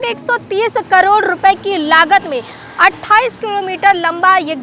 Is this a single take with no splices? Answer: yes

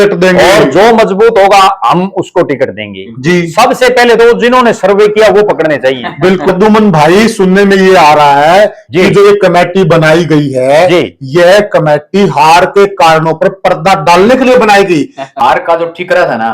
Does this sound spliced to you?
yes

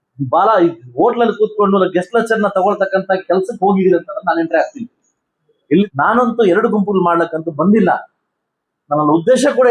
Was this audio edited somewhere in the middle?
yes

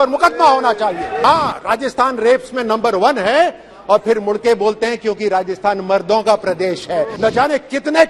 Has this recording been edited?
yes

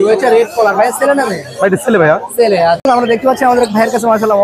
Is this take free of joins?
no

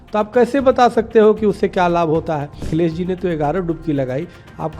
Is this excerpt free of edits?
no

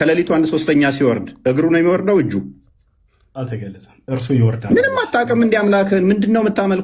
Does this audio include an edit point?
no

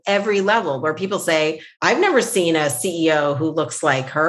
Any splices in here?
yes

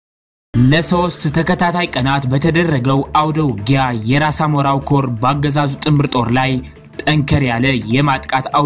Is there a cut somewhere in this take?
no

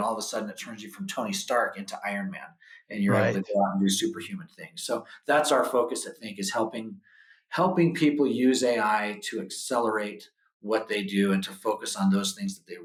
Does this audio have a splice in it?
no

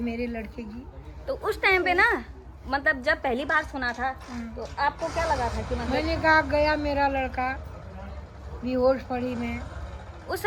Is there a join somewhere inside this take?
no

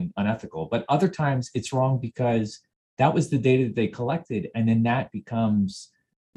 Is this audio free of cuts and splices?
yes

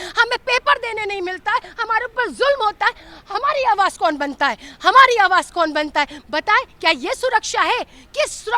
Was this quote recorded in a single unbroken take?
yes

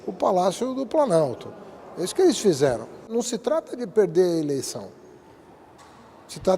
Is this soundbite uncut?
no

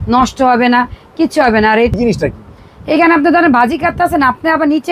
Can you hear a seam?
yes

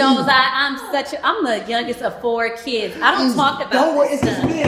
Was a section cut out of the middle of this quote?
no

